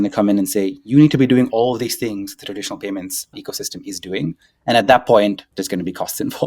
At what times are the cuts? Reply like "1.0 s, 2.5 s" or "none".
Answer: 3.4 s, 5.5 s